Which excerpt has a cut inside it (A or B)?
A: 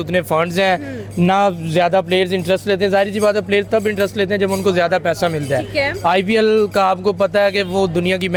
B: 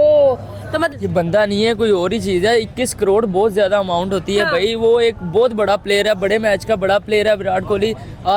B